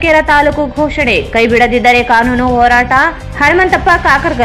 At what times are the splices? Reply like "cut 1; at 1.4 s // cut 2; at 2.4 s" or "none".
none